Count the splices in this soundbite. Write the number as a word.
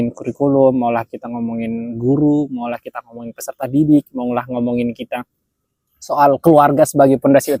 zero